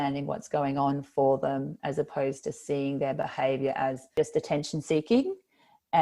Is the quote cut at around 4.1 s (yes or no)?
yes